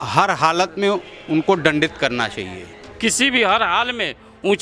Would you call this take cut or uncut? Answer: cut